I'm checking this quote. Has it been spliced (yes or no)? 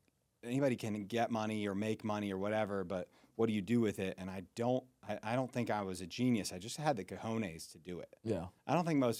no